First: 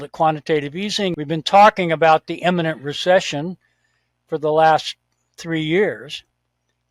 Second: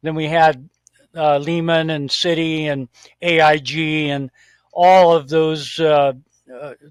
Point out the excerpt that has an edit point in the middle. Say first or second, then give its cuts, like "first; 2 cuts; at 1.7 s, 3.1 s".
first; 1 cut; at 1.2 s